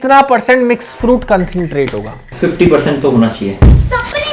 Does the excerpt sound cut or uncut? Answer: cut